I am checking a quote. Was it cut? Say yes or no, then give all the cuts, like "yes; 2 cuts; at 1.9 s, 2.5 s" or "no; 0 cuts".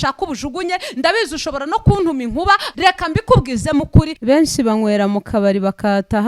yes; 2 cuts; at 2.7 s, 4.1 s